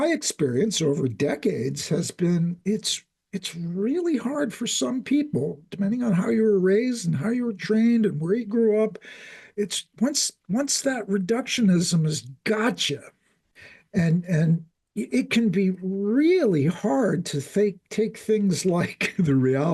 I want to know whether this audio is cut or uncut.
uncut